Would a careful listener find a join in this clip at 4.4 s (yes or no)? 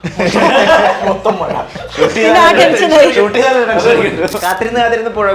yes